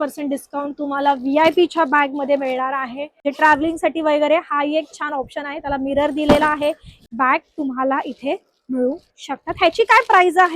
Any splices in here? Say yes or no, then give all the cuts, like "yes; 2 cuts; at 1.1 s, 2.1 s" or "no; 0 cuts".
yes; 2 cuts; at 3.0 s, 7.0 s